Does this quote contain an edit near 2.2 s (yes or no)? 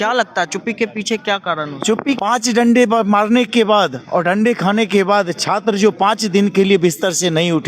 yes